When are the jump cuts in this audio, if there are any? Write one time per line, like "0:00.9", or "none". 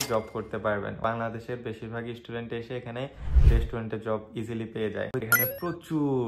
0:01.0
0:05.2